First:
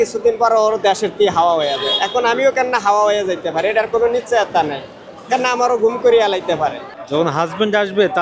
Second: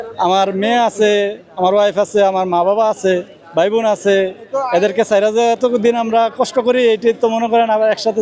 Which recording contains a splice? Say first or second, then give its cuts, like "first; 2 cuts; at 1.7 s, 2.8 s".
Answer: first; 1 cut; at 6.9 s